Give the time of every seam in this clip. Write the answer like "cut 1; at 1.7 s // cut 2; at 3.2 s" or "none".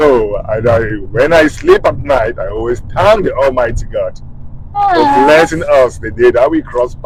none